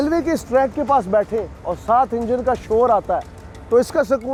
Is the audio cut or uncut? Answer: uncut